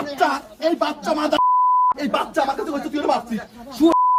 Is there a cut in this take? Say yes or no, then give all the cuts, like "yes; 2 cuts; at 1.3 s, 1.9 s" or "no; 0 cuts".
no; 0 cuts